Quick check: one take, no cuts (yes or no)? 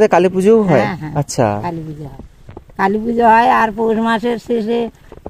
yes